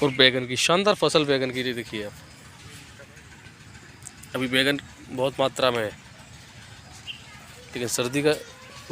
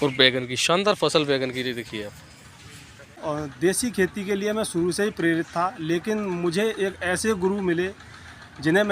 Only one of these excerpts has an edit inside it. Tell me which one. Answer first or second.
second